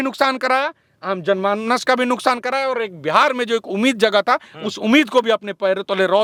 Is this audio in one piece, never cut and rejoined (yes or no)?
yes